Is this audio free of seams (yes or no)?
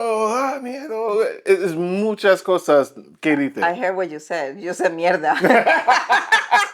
yes